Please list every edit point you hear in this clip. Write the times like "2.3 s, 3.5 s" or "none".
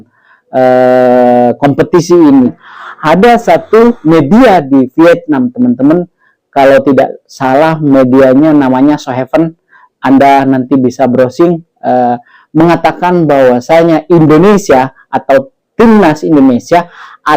2.5 s